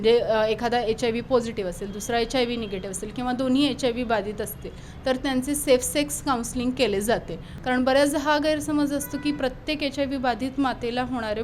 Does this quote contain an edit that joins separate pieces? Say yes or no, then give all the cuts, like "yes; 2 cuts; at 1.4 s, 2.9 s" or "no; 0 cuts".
yes; 1 cut; at 7.5 s